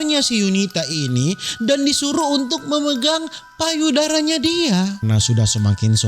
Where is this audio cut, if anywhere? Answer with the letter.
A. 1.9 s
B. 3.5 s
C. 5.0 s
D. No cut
C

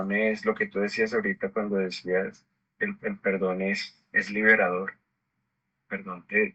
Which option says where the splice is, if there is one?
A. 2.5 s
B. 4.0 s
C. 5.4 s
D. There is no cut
D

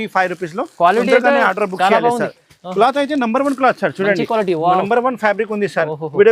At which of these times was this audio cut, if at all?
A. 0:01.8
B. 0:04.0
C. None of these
C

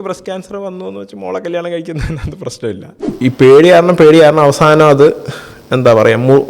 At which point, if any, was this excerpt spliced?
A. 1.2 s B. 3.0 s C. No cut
B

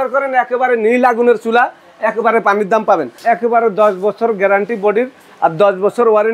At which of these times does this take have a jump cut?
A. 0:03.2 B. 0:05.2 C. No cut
A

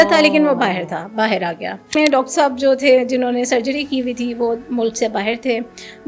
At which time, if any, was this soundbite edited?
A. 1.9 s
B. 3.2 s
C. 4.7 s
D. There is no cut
A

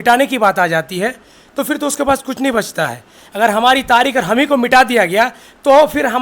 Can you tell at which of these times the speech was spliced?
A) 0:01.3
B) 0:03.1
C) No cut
C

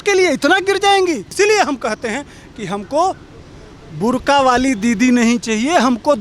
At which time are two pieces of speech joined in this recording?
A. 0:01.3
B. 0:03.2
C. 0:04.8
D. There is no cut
A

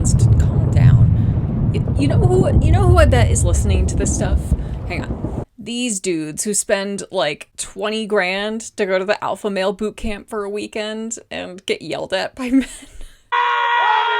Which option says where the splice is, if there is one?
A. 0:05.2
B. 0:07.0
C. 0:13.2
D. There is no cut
C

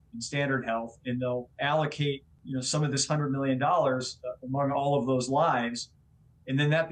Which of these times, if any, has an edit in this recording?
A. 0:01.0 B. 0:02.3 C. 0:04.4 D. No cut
B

